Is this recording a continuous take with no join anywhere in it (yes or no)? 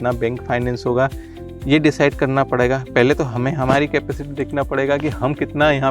yes